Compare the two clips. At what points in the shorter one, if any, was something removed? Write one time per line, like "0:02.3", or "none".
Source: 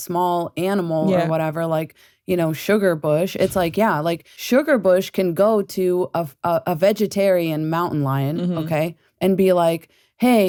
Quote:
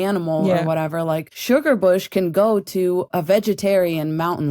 0:01.3
0:03.1